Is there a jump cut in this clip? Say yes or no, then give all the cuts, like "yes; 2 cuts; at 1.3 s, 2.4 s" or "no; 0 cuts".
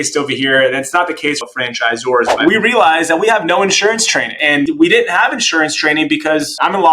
yes; 2 cuts; at 2.3 s, 4.6 s